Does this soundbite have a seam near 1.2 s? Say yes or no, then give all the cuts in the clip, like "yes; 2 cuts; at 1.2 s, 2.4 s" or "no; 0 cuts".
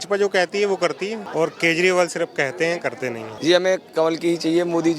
yes; 2 cuts; at 1.2 s, 3.3 s